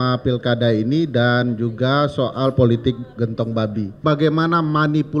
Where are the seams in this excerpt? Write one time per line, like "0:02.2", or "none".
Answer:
0:04.0